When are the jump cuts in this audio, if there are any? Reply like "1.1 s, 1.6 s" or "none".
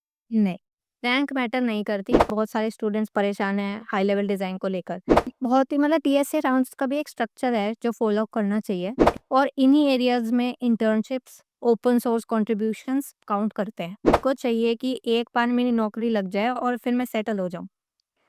2.3 s, 5.3 s, 9.0 s, 14.2 s